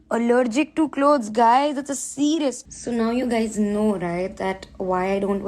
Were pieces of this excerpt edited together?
yes; 1 cut; at 2.6 s

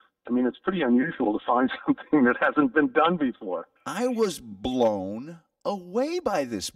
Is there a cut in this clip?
yes; 1 cut; at 3.8 s

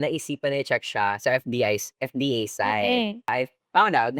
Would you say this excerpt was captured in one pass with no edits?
no; 1 cut; at 3.3 s

